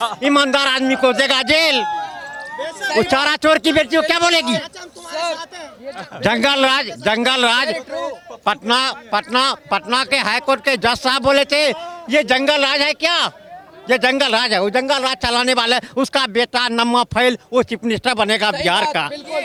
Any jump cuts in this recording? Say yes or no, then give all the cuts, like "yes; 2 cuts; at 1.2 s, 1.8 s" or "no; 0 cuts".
no; 0 cuts